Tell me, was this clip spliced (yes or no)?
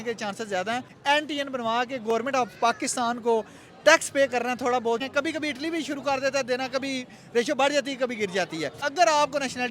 yes